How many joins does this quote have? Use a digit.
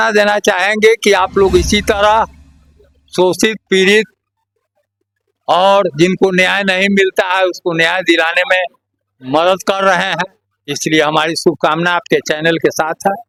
0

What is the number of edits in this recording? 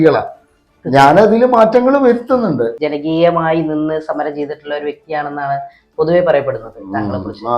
1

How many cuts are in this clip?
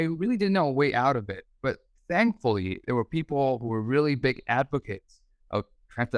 0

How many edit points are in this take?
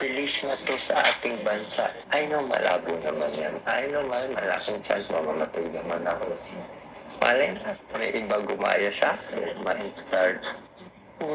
1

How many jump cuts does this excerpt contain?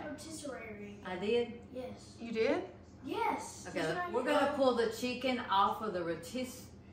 1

